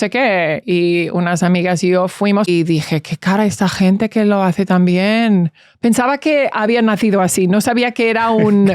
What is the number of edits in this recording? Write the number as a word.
one